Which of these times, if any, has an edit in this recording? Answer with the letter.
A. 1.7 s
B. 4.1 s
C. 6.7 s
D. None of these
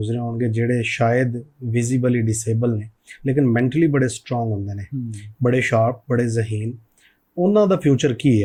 D